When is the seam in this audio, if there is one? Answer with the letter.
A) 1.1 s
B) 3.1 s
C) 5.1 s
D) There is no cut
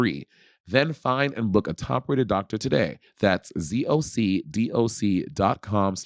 D